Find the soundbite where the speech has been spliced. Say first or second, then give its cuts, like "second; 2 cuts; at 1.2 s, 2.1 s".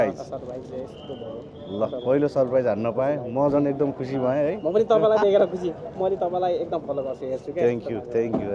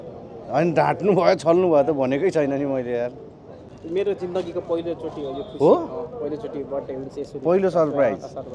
second; 1 cut; at 3.8 s